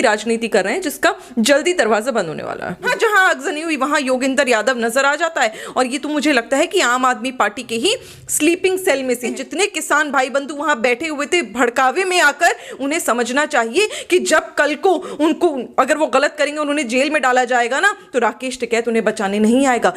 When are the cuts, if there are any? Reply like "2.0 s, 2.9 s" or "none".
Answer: 2.9 s, 9.3 s